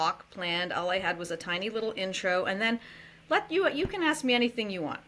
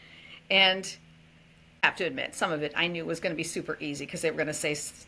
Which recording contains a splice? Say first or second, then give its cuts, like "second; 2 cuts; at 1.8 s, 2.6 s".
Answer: second; 1 cut; at 1.8 s